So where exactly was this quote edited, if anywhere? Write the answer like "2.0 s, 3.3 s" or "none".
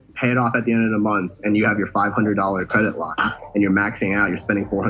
1.4 s